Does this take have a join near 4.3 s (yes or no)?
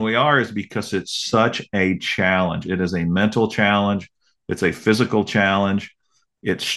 no